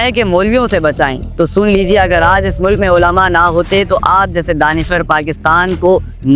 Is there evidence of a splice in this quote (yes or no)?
no